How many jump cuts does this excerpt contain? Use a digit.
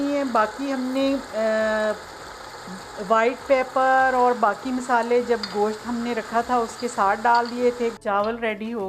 1